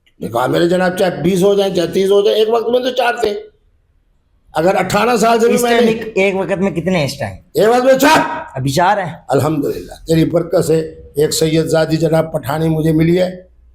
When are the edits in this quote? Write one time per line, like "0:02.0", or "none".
none